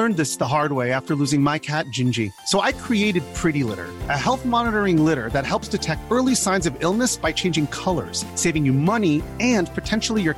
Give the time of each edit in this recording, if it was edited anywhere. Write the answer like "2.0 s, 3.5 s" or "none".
none